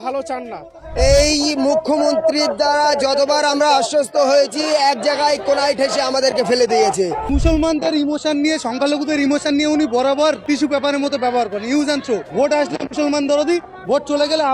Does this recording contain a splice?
yes; 4 cuts; at 0.9 s, 7.2 s, 10.4 s, 12.3 s

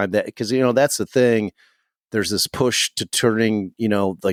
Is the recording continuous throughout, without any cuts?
yes; 0 cuts

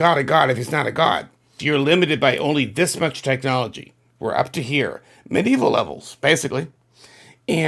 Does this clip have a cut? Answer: yes; 1 cut; at 1.6 s

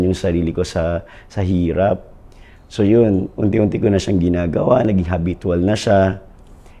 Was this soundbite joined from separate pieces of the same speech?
no; 0 cuts

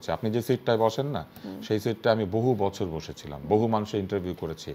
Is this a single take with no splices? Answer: yes; 0 cuts

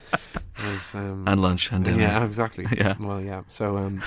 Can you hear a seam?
no; 0 cuts

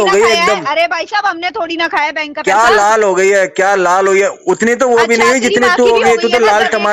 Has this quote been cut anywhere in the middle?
no; 0 cuts

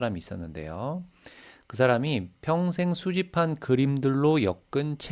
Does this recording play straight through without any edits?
yes; 0 cuts

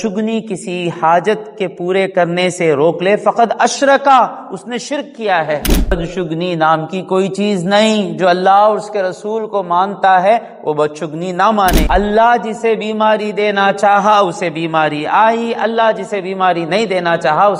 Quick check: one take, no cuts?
no; 2 cuts; at 5.9 s, 11.8 s

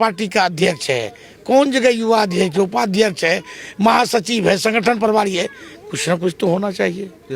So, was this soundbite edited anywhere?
no; 0 cuts

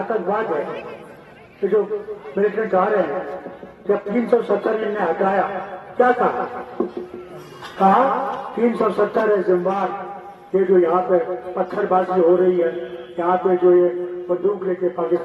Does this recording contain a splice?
no; 0 cuts

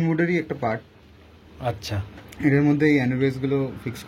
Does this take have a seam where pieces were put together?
no; 0 cuts

